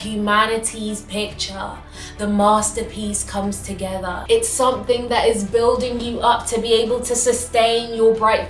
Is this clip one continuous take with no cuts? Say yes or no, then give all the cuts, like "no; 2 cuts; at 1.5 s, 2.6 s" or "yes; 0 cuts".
no; 1 cut; at 4.1 s